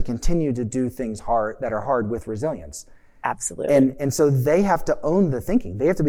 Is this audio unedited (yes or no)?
yes